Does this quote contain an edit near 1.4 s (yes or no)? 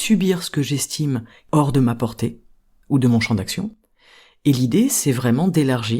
yes